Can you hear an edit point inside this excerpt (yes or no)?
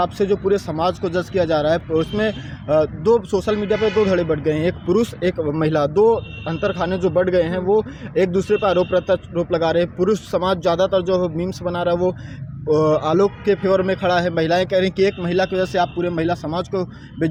no